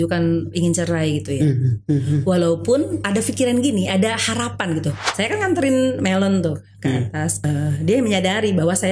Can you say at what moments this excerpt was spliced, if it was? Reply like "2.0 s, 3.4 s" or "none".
3.0 s, 5.0 s, 7.3 s